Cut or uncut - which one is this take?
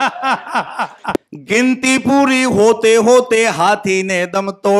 cut